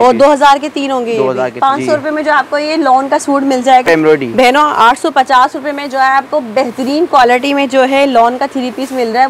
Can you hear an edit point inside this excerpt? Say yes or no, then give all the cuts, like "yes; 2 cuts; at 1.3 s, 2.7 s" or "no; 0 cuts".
yes; 2 cuts; at 1.5 s, 3.9 s